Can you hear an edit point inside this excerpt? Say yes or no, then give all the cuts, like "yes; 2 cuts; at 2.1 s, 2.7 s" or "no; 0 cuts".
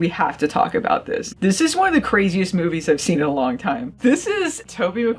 yes; 2 cuts; at 1.3 s, 3.9 s